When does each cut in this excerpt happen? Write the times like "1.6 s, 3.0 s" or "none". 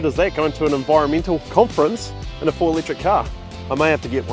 1.5 s